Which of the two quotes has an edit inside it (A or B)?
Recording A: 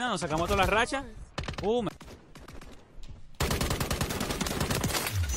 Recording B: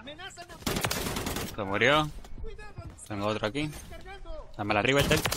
A